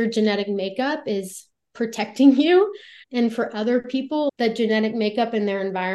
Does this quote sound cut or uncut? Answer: cut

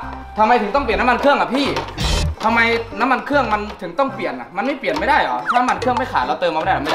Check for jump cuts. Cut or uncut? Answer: uncut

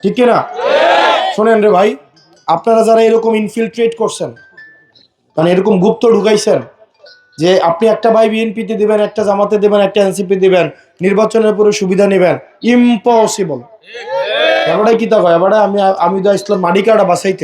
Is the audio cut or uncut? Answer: cut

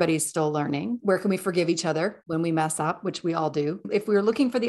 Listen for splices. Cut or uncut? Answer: cut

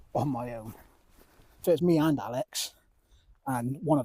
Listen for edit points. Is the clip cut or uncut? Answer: cut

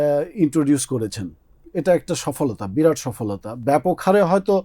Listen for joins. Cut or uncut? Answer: uncut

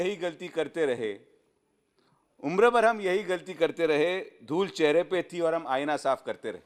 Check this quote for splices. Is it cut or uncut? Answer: uncut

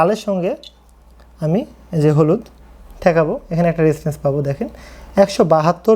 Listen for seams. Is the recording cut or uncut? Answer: uncut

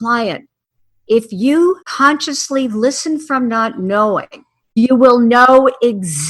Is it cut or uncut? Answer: cut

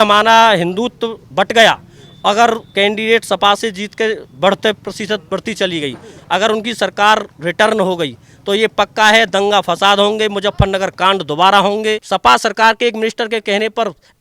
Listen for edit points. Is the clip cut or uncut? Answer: cut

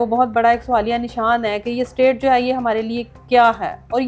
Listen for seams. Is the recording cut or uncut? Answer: uncut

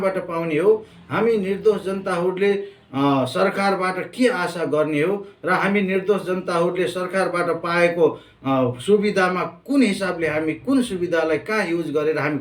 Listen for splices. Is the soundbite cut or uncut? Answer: uncut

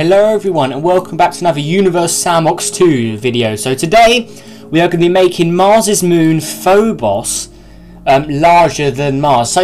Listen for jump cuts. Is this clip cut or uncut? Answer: cut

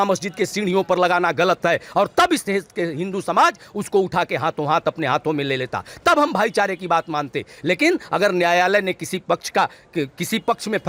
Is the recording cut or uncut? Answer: uncut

